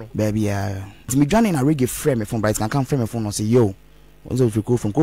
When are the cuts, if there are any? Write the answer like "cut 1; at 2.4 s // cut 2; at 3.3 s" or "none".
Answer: cut 1; at 1.1 s